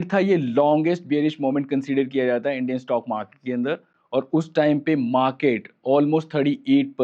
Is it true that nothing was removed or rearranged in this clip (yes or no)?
yes